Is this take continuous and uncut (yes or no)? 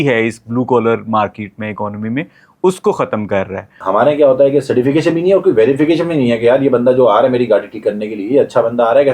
no